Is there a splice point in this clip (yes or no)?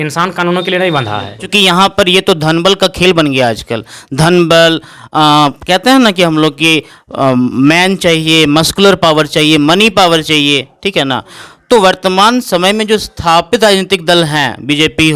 yes